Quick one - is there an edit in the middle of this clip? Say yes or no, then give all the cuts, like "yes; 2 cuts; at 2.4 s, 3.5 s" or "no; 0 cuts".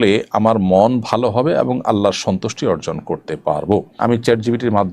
yes; 1 cut; at 4.0 s